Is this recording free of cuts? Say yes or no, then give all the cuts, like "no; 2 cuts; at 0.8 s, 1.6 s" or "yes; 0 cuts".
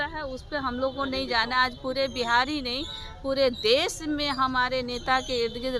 yes; 0 cuts